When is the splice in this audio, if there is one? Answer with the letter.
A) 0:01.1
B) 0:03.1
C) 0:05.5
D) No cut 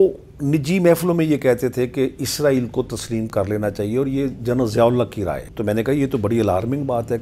C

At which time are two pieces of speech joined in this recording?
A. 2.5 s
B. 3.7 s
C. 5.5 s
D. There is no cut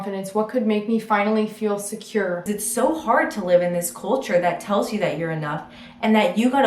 A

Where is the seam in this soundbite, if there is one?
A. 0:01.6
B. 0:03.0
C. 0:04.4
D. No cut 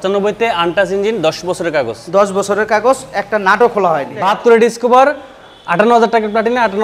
C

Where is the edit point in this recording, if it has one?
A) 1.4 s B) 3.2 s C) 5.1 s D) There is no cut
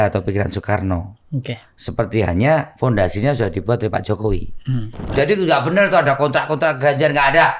C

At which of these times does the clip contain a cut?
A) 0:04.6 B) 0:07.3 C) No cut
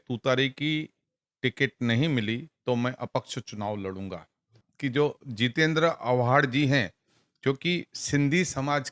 A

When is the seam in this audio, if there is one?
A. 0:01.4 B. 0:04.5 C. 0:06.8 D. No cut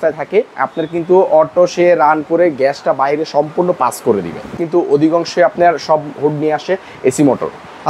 B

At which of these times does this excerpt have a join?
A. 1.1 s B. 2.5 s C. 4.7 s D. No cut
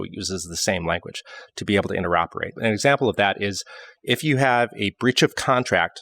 B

